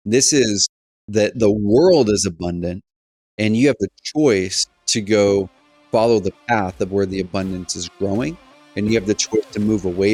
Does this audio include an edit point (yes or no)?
no